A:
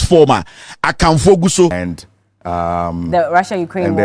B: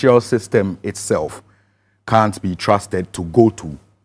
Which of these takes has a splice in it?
A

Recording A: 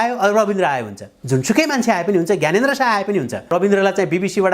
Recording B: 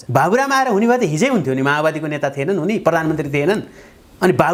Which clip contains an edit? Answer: A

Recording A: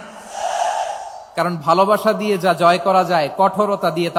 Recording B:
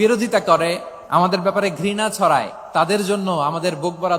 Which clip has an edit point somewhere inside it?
B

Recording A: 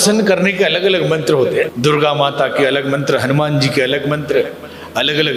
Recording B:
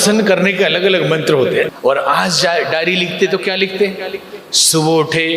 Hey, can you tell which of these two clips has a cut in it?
B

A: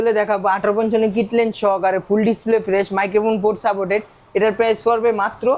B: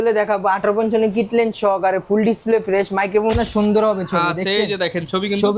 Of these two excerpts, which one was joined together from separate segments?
B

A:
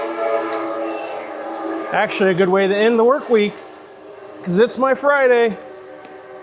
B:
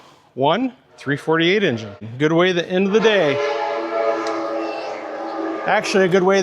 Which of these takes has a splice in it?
B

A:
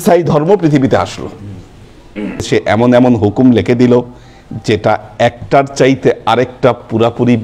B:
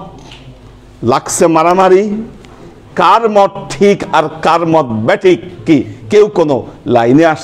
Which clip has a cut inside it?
A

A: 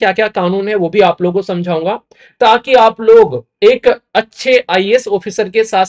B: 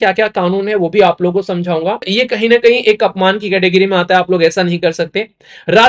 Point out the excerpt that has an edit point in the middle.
B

